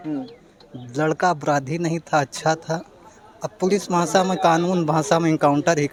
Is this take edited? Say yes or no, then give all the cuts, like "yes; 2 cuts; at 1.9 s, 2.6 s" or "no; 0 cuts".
no; 0 cuts